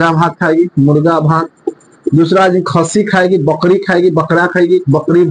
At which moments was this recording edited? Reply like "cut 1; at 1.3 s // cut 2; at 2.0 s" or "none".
none